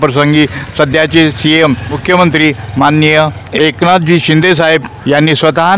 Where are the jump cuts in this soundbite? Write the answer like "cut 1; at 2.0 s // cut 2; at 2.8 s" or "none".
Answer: cut 1; at 1.9 s // cut 2; at 3.4 s // cut 3; at 4.9 s